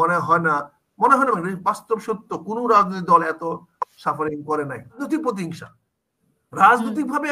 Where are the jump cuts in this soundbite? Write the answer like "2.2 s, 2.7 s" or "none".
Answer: 5.0 s

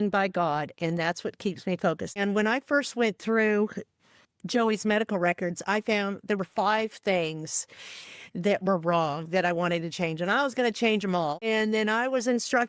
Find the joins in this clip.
2.2 s, 11.5 s

